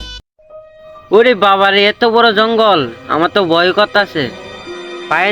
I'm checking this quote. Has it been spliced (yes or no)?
no